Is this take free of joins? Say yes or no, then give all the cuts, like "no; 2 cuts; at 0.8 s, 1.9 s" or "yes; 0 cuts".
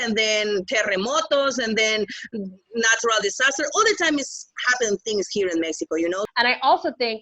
no; 1 cut; at 6.3 s